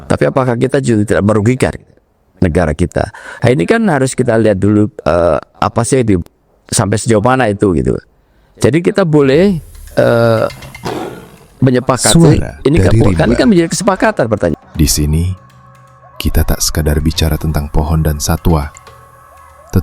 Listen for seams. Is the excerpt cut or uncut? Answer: cut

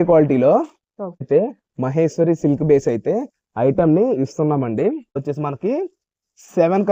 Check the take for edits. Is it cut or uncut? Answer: cut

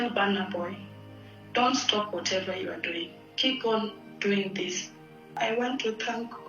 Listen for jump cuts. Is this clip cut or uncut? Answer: cut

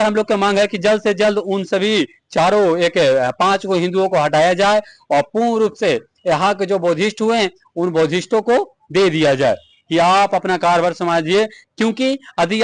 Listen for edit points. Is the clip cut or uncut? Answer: uncut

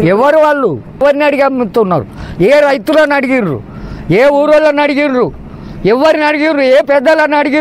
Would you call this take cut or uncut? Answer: cut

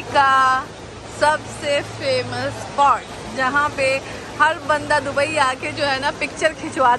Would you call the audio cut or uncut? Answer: uncut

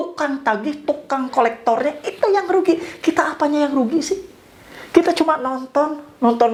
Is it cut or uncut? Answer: uncut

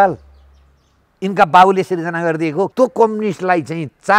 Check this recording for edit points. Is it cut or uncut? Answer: cut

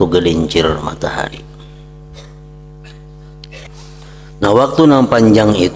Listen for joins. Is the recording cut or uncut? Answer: cut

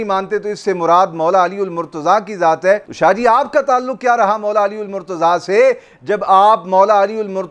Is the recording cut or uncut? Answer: uncut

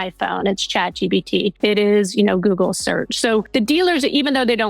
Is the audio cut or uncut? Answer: cut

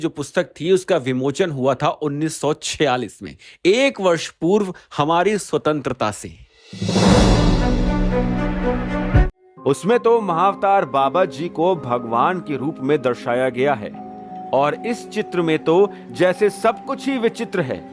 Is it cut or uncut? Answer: cut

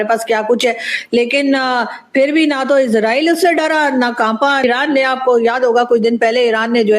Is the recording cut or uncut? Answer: cut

